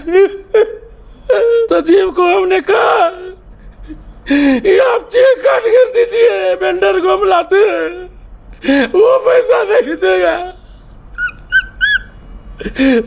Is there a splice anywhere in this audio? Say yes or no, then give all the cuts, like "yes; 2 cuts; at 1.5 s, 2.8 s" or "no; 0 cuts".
yes; 1 cut; at 1.7 s